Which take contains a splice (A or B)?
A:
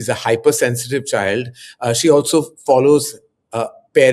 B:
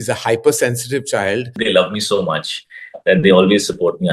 B